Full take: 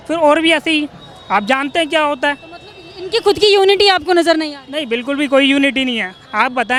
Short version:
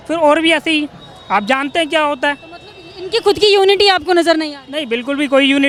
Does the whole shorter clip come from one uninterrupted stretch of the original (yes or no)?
yes